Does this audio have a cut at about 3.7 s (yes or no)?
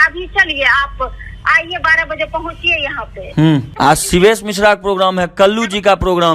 yes